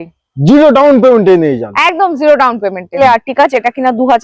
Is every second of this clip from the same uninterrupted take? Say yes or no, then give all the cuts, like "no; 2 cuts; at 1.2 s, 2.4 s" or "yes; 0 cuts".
no; 1 cut; at 3.0 s